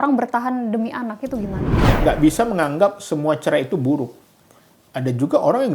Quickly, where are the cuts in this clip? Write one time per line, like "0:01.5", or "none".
0:01.8